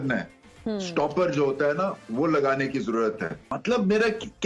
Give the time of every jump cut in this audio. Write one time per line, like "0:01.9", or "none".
0:03.5